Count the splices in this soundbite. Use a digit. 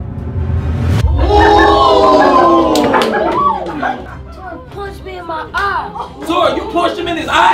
1